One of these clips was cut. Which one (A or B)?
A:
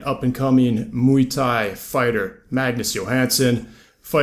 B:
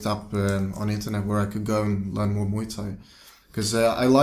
B